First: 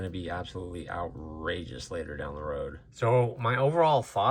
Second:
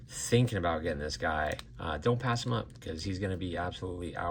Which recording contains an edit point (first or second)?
first